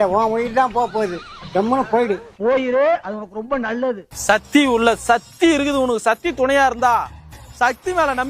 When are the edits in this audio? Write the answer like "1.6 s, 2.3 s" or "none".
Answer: 1.1 s, 4.1 s